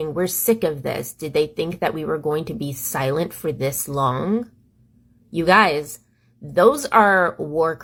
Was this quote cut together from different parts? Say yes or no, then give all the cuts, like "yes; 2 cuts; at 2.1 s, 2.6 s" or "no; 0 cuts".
no; 0 cuts